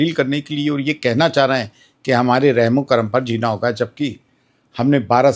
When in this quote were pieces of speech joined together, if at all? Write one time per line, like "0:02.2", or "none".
none